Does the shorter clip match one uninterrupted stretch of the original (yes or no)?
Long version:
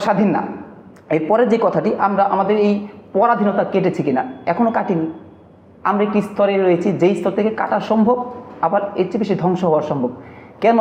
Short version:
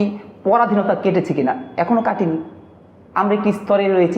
yes